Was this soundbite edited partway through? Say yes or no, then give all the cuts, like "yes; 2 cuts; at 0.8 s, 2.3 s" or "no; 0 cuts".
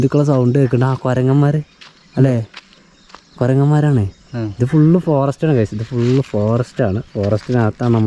no; 0 cuts